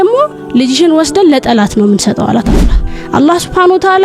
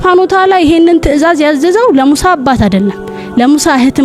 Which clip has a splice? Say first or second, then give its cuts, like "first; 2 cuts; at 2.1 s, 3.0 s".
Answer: first; 1 cut; at 2.5 s